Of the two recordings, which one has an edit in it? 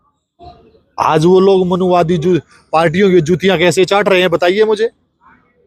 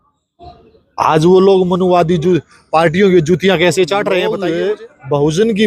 second; 1 cut; at 4.4 s

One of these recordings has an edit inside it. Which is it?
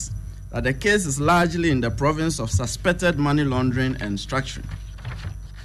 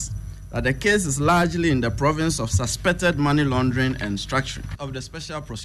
second; 1 cut; at 4.7 s

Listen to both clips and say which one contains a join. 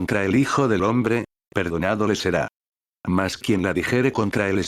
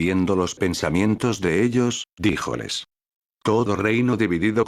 second; 1 cut; at 2.1 s

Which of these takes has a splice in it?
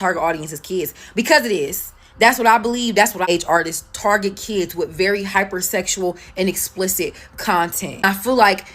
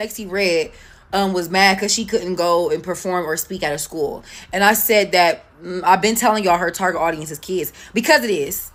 first; 1 cut; at 3.3 s

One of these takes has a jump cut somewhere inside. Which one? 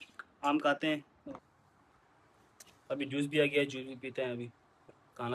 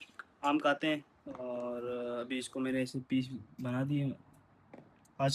first; 1 cut; at 1.2 s

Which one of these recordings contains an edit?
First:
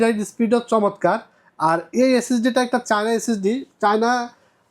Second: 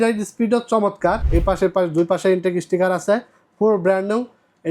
second; 1 cut; at 1.2 s

